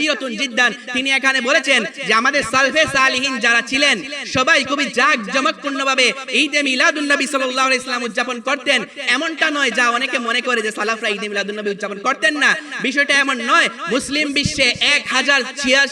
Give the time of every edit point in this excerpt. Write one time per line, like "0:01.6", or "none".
0:13.8